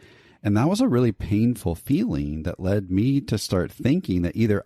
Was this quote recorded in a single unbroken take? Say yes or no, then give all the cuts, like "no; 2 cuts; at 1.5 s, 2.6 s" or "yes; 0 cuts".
yes; 0 cuts